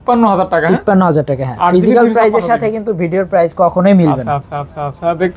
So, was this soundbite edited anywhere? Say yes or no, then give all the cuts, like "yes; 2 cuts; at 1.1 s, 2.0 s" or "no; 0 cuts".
no; 0 cuts